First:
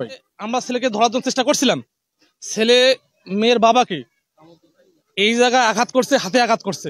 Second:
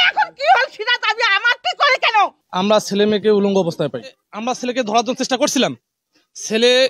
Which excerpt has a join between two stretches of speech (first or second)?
second